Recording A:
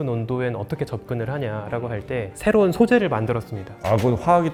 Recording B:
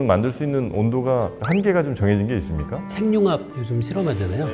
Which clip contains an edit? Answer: B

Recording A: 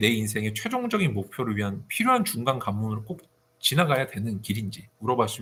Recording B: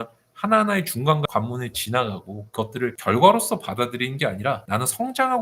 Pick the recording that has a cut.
B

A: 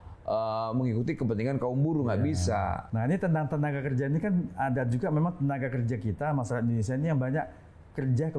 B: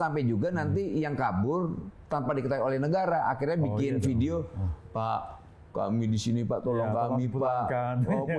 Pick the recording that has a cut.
A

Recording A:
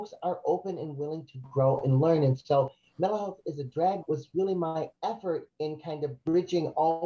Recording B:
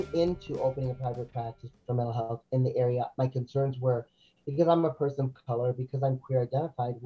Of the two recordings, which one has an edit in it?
A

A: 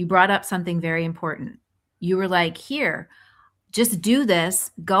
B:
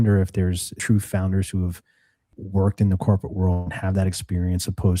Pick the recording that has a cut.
B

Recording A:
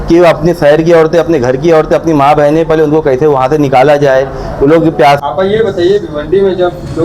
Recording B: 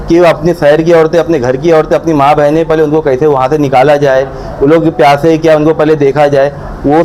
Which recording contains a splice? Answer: A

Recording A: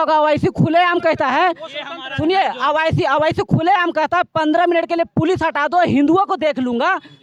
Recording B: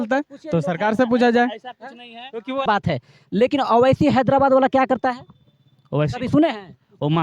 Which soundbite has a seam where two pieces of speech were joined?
B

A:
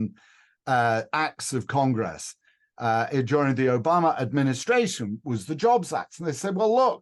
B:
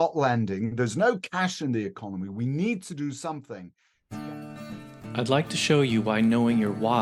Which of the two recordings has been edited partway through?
B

